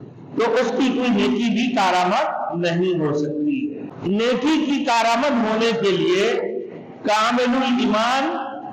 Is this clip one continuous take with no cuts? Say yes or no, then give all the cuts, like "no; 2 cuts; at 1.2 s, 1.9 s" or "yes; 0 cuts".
no; 1 cut; at 3.9 s